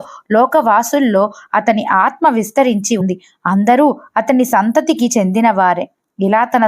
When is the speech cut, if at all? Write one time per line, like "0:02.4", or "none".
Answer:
0:03.0